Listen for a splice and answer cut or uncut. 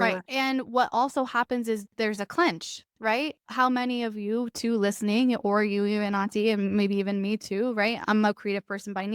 cut